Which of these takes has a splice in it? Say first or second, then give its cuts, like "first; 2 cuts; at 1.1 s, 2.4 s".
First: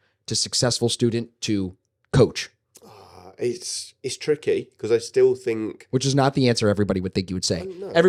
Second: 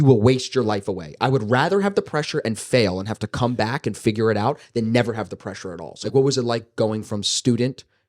second; 1 cut; at 5.9 s